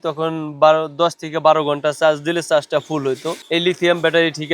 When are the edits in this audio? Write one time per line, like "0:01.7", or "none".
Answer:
0:03.3